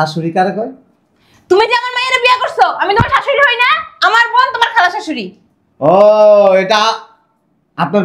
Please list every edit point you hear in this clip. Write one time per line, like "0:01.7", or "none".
none